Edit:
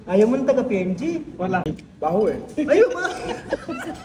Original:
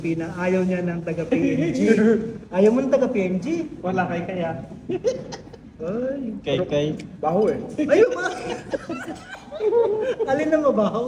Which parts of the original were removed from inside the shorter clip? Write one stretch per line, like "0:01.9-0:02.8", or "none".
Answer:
0:04.1-0:06.9